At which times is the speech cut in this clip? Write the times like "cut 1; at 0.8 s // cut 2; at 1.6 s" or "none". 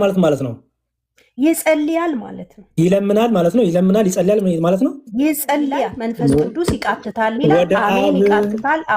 cut 1; at 6.0 s